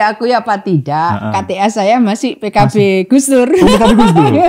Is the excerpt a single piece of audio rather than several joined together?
yes; 0 cuts

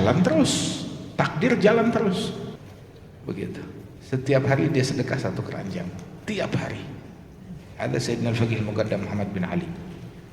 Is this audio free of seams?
no; 1 cut; at 2.4 s

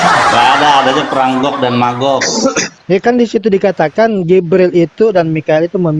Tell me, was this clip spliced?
yes; 1 cut; at 2.7 s

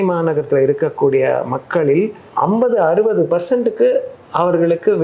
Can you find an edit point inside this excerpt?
yes; 1 cut; at 2.2 s

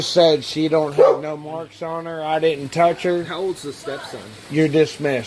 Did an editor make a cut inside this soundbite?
no; 0 cuts

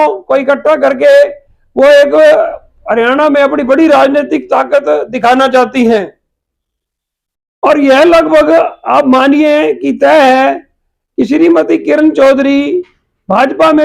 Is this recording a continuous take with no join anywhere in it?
yes; 0 cuts

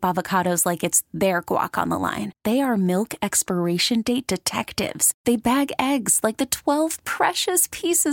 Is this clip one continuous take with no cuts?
yes; 0 cuts

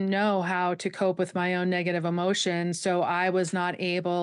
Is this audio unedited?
yes; 0 cuts

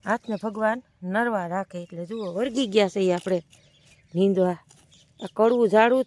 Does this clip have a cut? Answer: no; 0 cuts

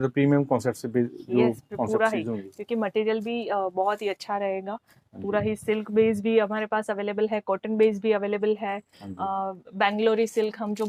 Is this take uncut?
yes; 0 cuts

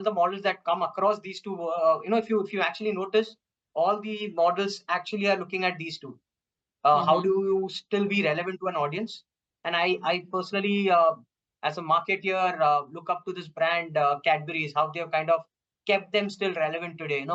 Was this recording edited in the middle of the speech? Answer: no; 0 cuts

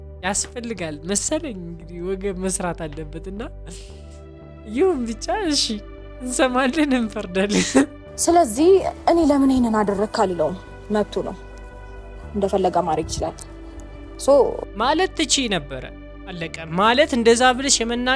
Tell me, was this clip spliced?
yes; 1 cut; at 8.0 s

